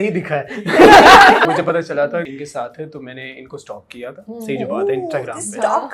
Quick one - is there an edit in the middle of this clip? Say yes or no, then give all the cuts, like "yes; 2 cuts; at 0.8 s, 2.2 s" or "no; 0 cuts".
yes; 2 cuts; at 1.4 s, 2.3 s